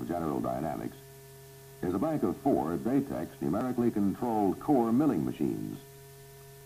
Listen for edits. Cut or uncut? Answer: cut